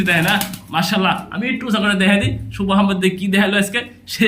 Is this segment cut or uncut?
uncut